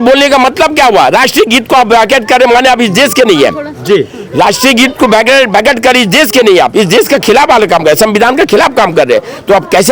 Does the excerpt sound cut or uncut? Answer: uncut